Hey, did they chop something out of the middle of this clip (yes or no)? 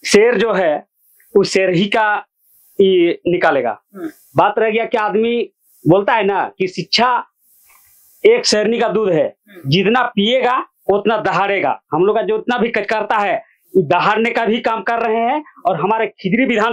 no